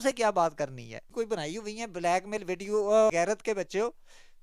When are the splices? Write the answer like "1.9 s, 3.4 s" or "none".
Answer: 1.0 s, 3.1 s